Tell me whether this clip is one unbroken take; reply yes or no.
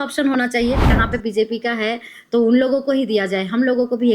no